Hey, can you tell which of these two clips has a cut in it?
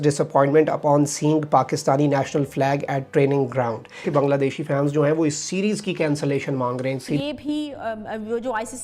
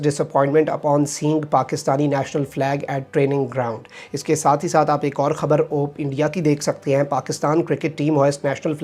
first; 2 cuts; at 4.1 s, 7.0 s

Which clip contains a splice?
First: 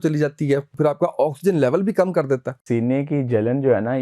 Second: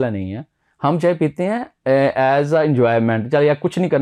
first; 2 cuts; at 0.8 s, 2.6 s

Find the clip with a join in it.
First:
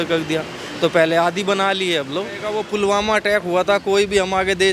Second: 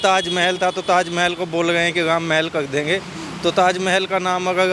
first; 1 cut; at 2.6 s

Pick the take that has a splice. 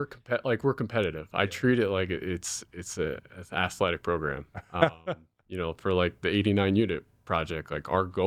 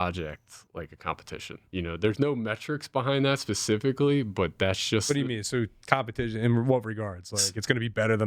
second; 1 cut; at 1.6 s

